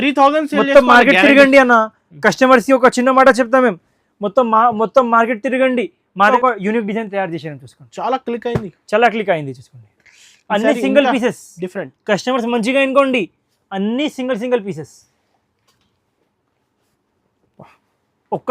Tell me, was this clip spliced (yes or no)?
yes